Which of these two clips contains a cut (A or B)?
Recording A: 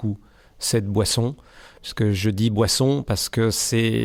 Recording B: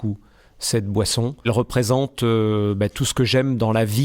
B